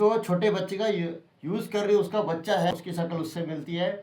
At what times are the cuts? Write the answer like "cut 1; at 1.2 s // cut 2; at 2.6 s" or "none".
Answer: cut 1; at 2.7 s